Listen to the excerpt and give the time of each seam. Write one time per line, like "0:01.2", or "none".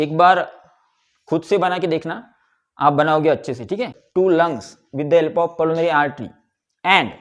0:04.0